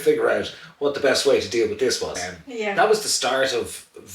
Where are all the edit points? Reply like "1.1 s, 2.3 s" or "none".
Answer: 2.7 s